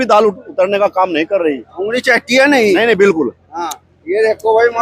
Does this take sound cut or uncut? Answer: uncut